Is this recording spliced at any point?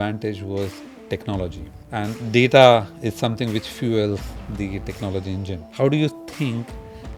yes; 2 cuts; at 1.7 s, 5.7 s

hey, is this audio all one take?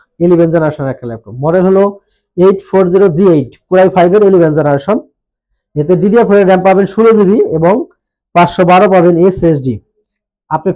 yes; 0 cuts

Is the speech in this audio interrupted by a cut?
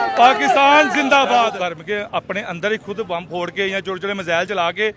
yes; 1 cut; at 1.6 s

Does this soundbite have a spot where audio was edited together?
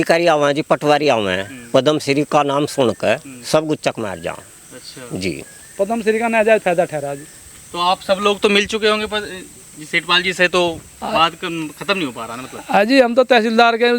no; 0 cuts

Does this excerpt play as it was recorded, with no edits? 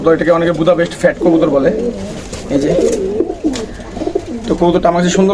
yes; 0 cuts

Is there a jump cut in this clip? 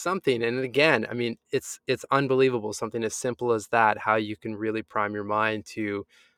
no; 0 cuts

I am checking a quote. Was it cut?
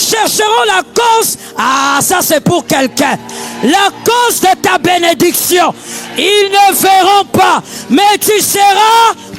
no; 0 cuts

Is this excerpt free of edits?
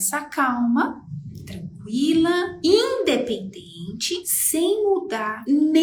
yes; 0 cuts

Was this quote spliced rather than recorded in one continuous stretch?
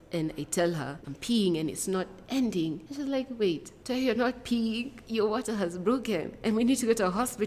yes; 4 cuts; at 1.1 s, 2.9 s, 3.7 s, 5.0 s

